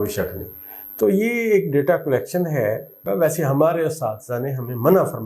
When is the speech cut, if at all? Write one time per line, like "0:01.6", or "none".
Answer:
0:03.0